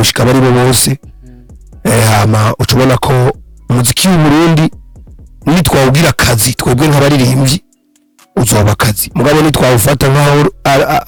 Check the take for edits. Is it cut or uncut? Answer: uncut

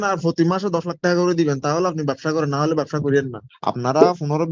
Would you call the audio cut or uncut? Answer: cut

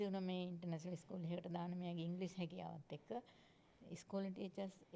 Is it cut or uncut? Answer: uncut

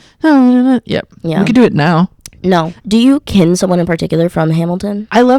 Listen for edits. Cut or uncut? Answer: cut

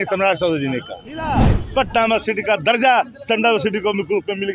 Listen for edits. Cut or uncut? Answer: cut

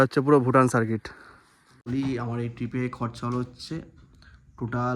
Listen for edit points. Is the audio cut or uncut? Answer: cut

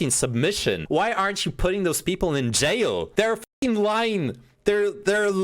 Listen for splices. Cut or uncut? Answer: cut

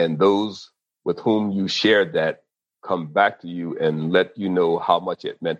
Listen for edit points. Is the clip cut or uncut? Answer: uncut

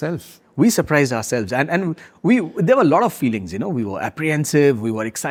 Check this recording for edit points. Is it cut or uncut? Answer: uncut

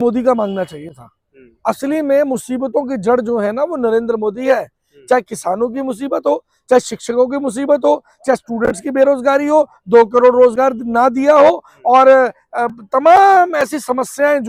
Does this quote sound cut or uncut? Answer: uncut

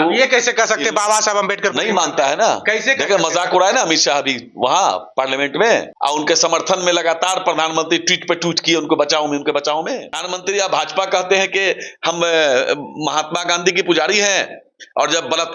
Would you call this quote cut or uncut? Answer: cut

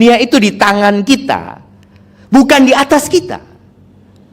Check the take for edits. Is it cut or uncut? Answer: uncut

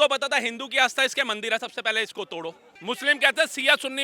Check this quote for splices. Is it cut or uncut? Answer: cut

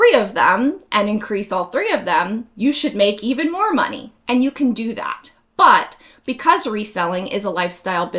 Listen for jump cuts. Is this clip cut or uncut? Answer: uncut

